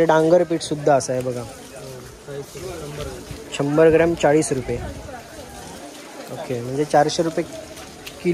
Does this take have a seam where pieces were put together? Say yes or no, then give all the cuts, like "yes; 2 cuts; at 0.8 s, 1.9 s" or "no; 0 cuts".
no; 0 cuts